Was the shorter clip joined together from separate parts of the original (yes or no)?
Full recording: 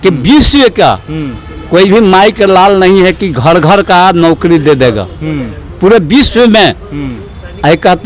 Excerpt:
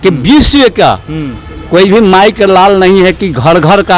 no